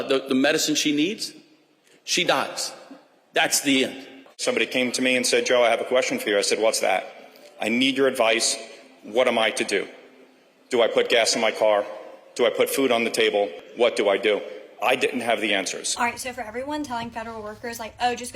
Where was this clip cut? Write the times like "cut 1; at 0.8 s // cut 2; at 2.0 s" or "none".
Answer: cut 1; at 4.3 s // cut 2; at 13.6 s // cut 3; at 15.8 s